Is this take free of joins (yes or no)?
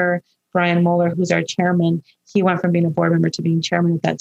no